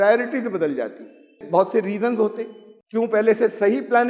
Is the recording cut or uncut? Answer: cut